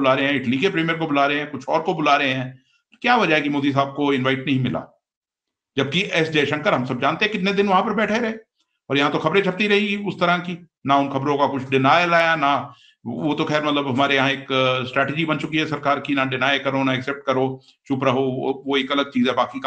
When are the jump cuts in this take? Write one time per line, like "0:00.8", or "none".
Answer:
none